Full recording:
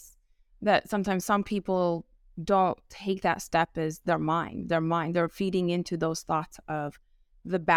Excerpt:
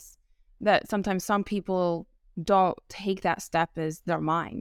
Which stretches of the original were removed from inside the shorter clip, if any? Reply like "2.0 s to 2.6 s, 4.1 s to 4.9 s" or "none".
none